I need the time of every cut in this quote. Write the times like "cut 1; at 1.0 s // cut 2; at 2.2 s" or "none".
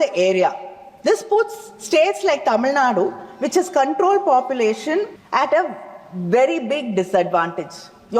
cut 1; at 5.2 s